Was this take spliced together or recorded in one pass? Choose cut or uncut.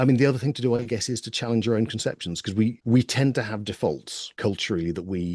cut